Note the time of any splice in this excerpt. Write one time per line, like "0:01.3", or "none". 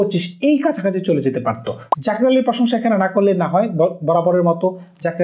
0:01.9